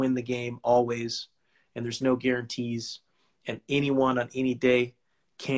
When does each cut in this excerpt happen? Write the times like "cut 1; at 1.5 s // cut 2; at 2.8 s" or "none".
none